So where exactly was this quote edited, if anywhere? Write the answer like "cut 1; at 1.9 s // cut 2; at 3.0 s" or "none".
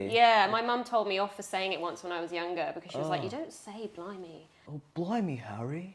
cut 1; at 4.6 s